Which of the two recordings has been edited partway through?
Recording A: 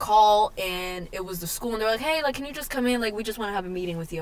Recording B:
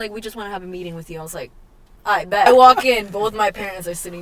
B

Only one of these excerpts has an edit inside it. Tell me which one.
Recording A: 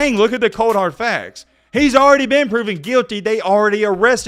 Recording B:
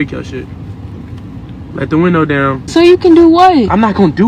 B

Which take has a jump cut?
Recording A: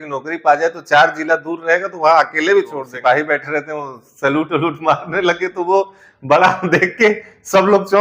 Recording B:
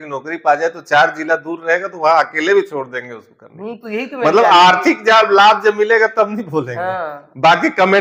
A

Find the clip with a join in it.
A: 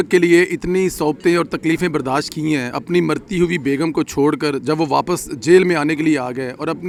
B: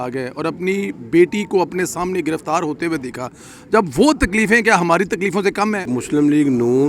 B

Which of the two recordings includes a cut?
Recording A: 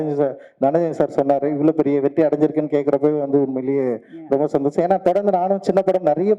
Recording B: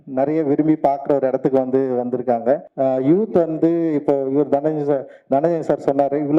B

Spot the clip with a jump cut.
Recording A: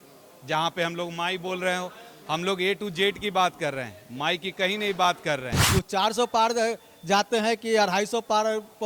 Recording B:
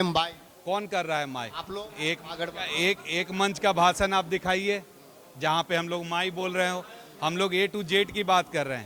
A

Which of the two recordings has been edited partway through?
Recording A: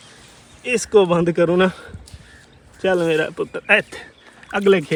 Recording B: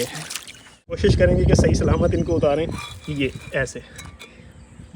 B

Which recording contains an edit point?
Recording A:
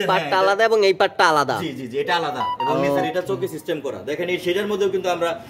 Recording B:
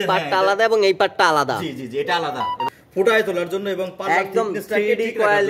B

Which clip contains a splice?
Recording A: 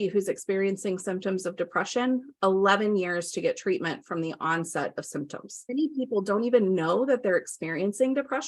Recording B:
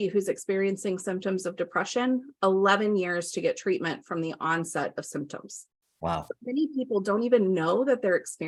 A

